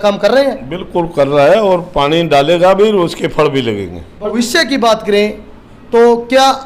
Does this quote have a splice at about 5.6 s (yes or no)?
no